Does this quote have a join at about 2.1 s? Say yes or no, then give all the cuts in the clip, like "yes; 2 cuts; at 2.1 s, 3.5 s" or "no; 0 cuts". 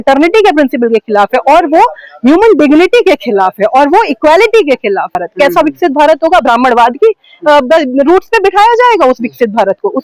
no; 1 cut; at 5.2 s